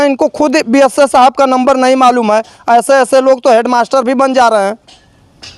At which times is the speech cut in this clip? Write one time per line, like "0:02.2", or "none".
none